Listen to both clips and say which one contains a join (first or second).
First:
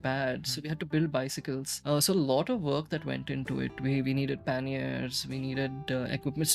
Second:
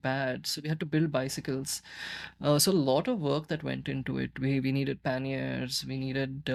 first